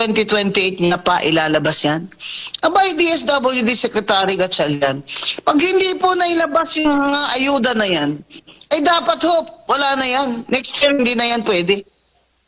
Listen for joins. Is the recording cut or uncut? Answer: uncut